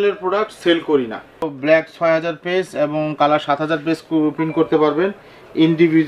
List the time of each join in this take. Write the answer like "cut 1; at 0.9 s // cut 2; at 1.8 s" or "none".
cut 1; at 1.5 s